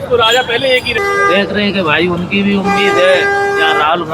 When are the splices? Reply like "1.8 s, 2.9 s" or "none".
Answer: 1.0 s